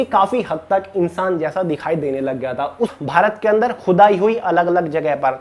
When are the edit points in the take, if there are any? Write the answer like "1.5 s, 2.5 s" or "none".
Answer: 2.9 s